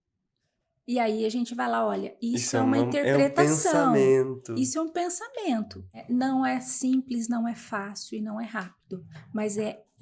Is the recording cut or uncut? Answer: cut